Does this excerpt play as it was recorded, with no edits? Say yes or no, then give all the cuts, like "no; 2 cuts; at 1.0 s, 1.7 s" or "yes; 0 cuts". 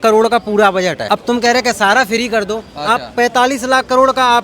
no; 1 cut; at 1.0 s